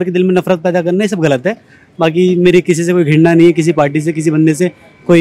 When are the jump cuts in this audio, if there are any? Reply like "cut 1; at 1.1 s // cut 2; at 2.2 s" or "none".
none

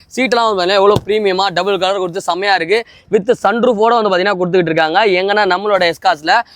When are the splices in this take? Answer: none

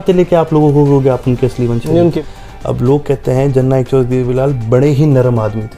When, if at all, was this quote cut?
cut 1; at 2.2 s

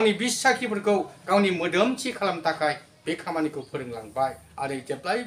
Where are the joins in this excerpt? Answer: none

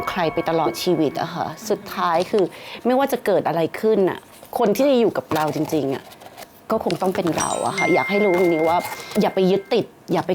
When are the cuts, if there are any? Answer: none

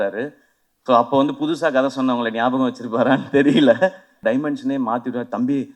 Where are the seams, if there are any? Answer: cut 1; at 4.1 s

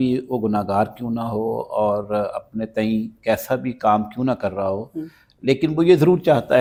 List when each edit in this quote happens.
none

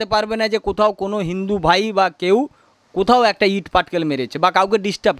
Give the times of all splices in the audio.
none

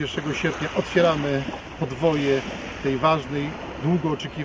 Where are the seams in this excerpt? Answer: none

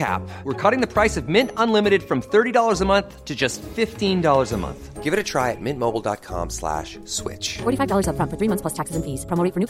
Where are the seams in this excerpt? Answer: none

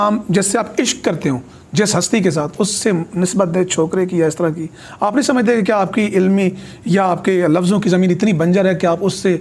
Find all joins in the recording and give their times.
none

